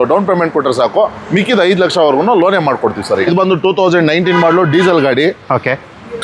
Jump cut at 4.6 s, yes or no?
no